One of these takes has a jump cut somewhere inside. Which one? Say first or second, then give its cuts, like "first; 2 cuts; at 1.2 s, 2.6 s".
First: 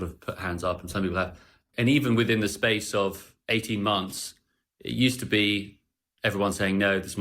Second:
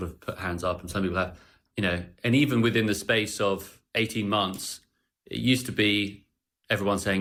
first; 1 cut; at 1.6 s